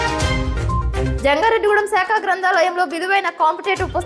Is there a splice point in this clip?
yes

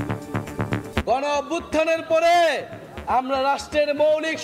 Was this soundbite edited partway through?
yes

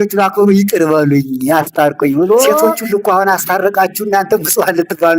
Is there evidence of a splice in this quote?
yes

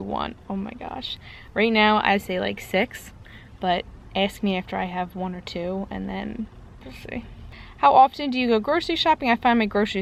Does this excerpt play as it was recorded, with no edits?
yes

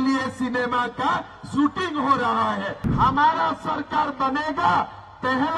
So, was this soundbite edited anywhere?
yes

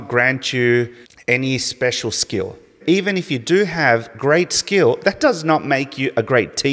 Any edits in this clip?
yes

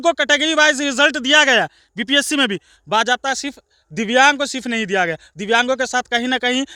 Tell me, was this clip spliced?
no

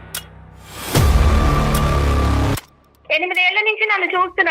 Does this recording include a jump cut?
yes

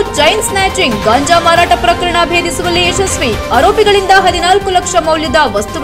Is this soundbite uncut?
yes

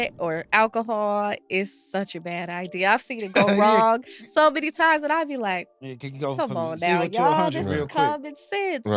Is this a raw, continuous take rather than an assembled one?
yes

